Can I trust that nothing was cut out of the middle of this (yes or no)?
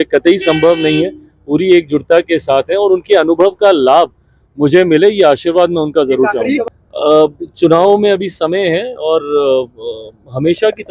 no